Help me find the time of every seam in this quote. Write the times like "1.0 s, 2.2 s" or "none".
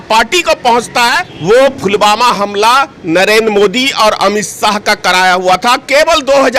1.3 s